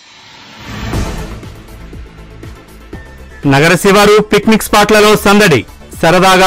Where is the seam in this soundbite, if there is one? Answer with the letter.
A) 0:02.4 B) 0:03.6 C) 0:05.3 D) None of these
D